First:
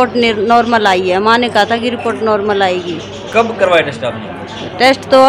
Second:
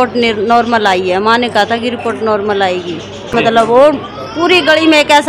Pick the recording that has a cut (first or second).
second